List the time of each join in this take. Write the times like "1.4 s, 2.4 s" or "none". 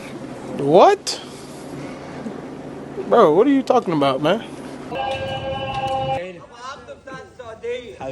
4.9 s, 6.2 s